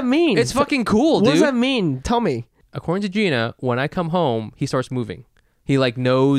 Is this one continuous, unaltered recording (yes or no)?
no